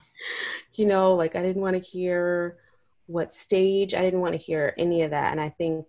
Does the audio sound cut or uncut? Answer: uncut